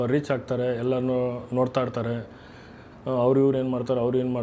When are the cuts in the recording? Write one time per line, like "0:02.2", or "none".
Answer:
none